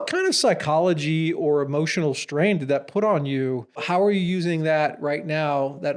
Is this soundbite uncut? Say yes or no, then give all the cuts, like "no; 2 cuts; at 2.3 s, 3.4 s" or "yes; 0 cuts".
no; 1 cut; at 3.8 s